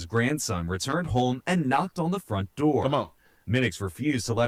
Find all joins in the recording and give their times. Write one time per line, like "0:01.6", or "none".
none